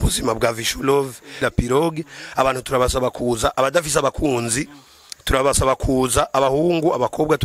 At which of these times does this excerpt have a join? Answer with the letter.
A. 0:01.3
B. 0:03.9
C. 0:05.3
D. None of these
A